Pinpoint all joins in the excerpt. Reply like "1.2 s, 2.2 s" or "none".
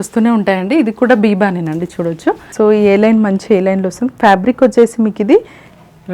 2.5 s